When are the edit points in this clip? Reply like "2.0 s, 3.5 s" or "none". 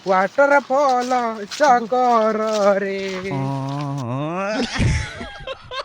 3.3 s